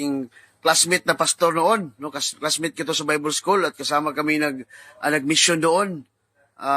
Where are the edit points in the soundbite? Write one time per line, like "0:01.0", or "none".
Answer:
0:02.3